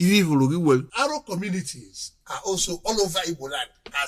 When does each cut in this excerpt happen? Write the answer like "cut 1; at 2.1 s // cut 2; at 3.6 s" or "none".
cut 1; at 0.9 s

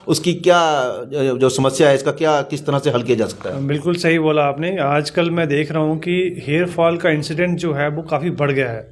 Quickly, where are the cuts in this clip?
none

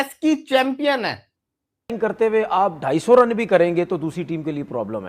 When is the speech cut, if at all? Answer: cut 1; at 1.9 s

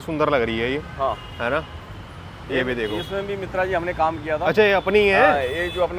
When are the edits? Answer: none

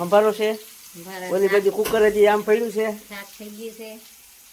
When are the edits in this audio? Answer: none

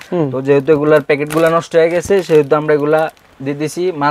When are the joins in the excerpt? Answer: none

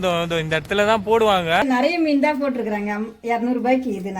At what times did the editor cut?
cut 1; at 1.6 s

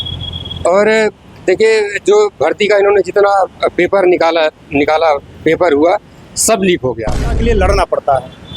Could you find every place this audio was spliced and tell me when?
cut 1; at 7.2 s

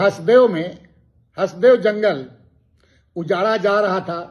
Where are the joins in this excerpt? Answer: none

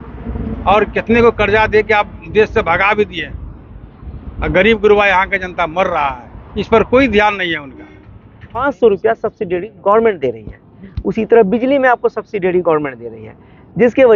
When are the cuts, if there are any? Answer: cut 1; at 8.6 s

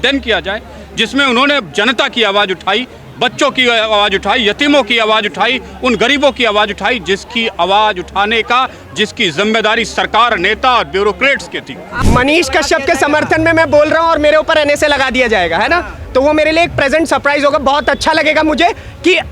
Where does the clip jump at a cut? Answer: cut 1; at 11.9 s

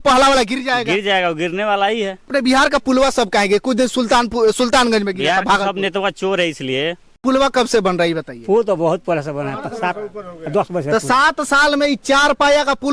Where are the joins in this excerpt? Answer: cut 1; at 2.3 s // cut 2; at 7.1 s

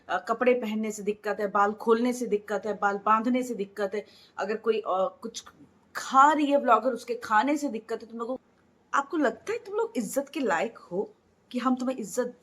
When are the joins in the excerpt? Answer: cut 1; at 8.4 s

